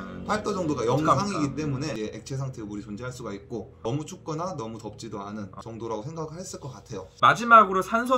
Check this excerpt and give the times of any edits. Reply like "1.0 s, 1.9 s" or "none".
none

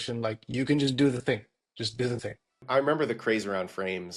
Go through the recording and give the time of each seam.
2.6 s

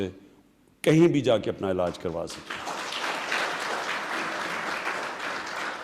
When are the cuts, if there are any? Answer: none

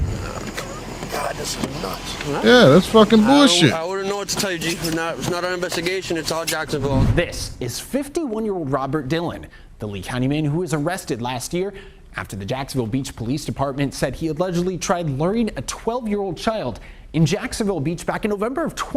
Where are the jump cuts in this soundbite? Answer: none

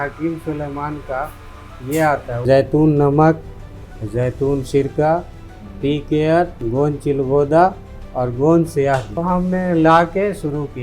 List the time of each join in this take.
2.4 s, 6.6 s, 9.1 s

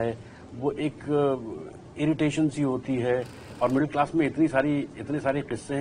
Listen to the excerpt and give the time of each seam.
3.5 s

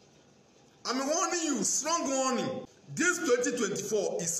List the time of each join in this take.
2.8 s

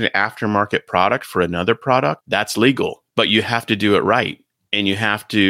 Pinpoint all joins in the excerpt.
2.2 s, 3.0 s

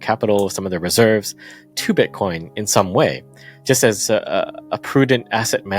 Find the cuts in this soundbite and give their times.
none

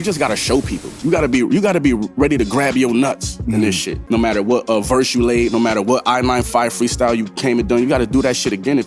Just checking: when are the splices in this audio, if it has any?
3.9 s

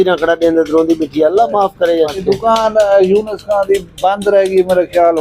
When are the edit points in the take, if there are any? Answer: 2.2 s

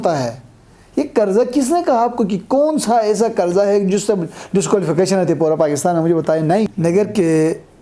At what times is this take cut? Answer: 6.7 s

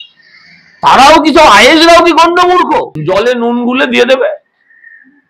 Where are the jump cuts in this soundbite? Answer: 2.9 s

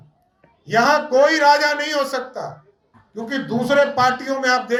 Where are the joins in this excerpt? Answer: none

